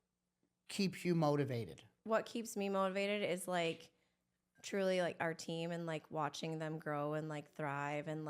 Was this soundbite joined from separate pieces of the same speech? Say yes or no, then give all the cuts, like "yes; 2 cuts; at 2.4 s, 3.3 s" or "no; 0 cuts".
yes; 1 cut; at 1.9 s